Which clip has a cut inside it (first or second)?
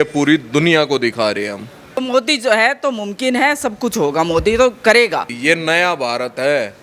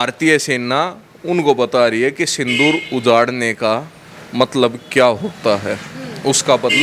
first